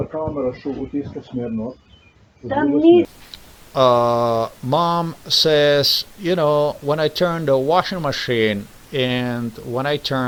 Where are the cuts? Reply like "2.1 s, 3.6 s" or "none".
none